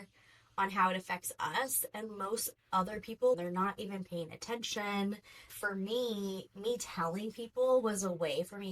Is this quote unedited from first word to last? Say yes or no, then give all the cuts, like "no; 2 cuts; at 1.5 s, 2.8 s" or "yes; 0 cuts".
no; 2 cuts; at 3.4 s, 5.5 s